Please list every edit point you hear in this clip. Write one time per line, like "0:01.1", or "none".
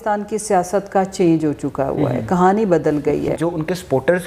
0:03.4